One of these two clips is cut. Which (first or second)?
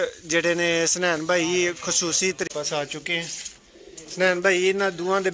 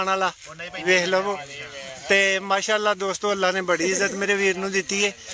first